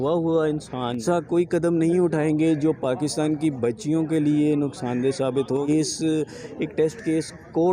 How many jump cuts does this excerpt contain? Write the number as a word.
two